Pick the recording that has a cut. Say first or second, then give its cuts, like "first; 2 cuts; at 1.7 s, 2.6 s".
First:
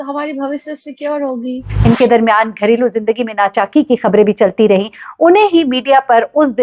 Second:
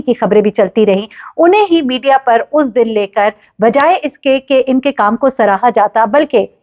first; 1 cut; at 1.7 s